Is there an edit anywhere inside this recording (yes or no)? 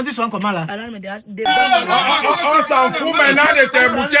yes